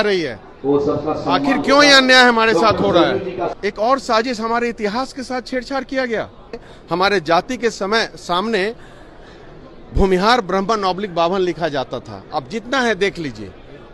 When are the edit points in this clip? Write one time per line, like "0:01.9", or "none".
0:03.5
0:06.7